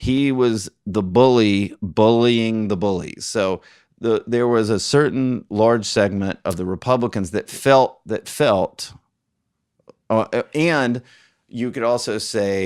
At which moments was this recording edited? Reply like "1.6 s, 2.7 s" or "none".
none